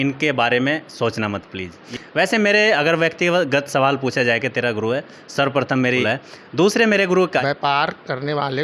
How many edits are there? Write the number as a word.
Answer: three